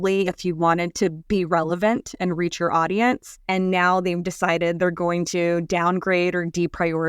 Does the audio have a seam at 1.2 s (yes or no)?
yes